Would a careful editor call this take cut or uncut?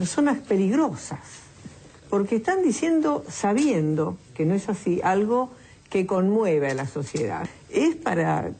cut